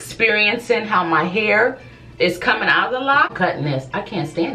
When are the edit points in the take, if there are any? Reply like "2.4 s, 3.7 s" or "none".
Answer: 3.3 s